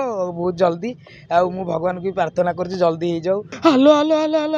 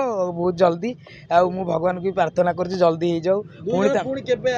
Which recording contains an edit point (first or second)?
first